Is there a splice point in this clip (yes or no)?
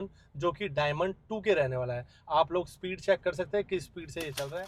no